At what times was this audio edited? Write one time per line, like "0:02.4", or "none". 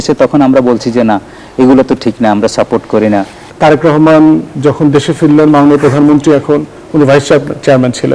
0:03.4

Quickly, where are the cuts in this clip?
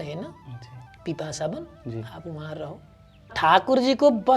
0:03.4

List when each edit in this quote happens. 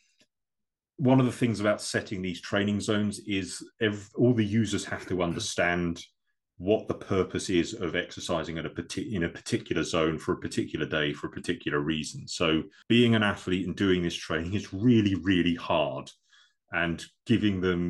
0:12.7

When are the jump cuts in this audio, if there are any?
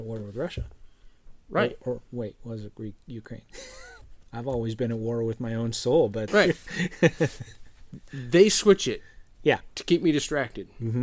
0:04.0
0:06.2

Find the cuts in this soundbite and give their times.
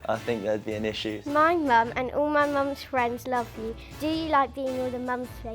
0:01.2
0:03.8

